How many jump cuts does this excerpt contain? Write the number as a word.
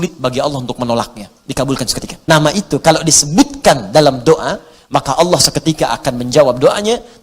one